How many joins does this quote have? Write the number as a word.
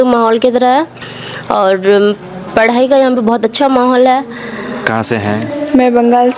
one